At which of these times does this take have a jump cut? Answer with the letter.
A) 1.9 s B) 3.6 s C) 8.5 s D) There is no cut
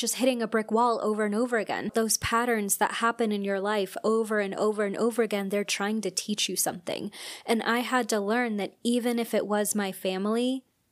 A